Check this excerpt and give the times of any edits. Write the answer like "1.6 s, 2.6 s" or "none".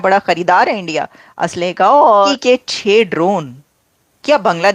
2.3 s